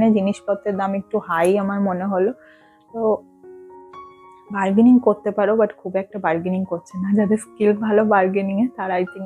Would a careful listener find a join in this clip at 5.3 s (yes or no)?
no